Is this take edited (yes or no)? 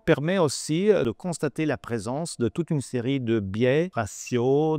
yes